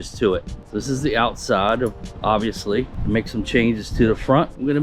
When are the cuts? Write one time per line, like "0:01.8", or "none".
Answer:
0:03.0